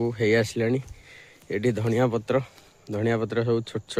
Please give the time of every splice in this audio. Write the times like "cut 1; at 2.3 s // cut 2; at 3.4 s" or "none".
none

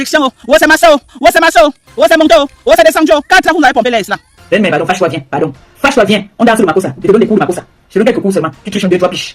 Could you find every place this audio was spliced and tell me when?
cut 1; at 4.3 s

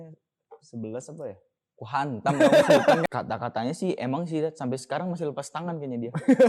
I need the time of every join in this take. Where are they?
cut 1; at 3.0 s

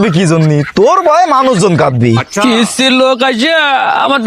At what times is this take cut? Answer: cut 1; at 2.2 s

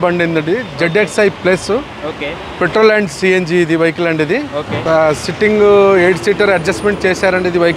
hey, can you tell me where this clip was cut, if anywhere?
cut 1; at 4.7 s

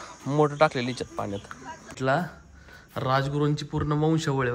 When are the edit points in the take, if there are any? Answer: cut 1; at 2.0 s

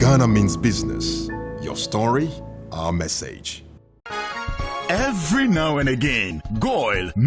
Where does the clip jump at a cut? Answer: cut 1; at 3.4 s

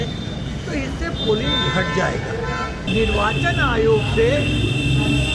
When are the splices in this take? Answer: cut 1; at 2.9 s

